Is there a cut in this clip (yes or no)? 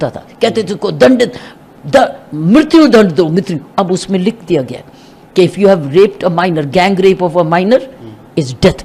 no